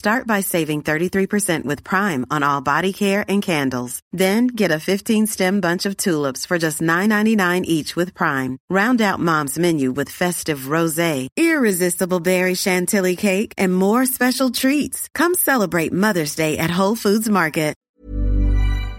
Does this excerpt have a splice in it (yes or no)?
yes